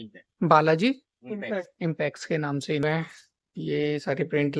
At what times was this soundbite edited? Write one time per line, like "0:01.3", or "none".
0:02.8